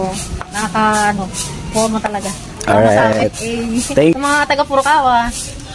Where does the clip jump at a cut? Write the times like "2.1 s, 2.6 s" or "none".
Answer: 4.1 s